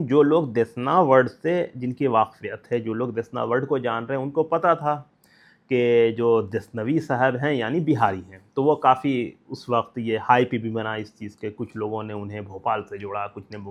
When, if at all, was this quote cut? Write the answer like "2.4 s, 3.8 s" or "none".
none